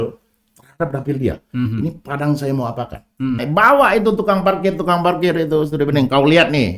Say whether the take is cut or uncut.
cut